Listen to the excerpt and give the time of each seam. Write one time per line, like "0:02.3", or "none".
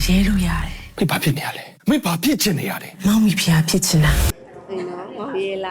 0:04.4